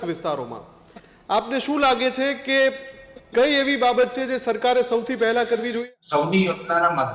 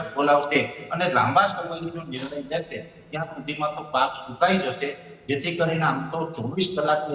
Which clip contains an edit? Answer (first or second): first